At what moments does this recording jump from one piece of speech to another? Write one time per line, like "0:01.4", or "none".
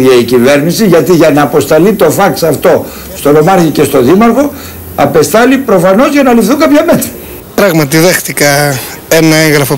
0:06.8